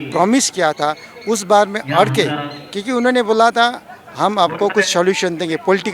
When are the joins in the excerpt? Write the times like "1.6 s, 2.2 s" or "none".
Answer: none

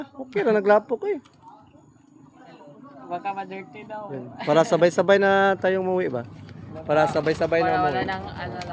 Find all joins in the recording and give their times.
none

